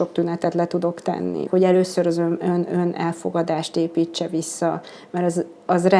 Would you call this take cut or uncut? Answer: cut